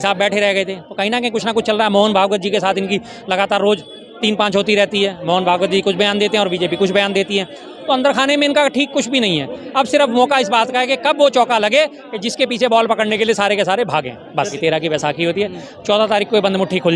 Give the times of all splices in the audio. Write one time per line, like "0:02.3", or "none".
0:14.5